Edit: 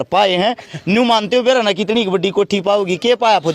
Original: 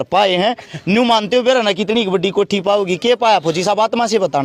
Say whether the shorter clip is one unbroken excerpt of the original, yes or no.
yes